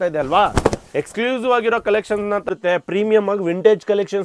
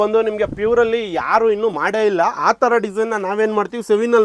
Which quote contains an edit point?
first; 1 cut; at 2.4 s

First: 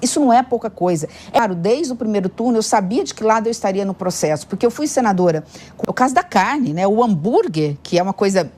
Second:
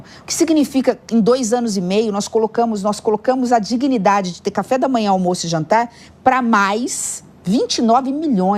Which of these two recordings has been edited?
first; 2 cuts; at 1.4 s, 5.7 s

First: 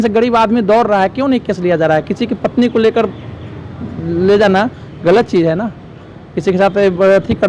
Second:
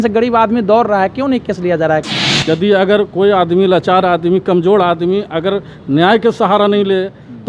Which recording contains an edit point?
second; 1 cut; at 2.3 s

